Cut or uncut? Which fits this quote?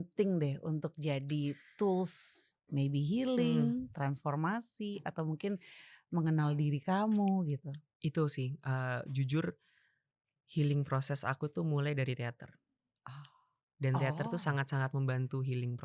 uncut